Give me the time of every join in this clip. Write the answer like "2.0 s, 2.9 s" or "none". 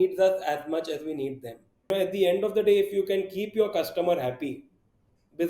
1.9 s